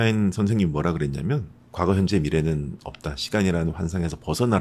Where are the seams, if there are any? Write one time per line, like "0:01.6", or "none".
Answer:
none